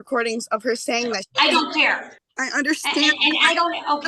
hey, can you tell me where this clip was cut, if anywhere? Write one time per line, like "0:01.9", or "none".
0:02.1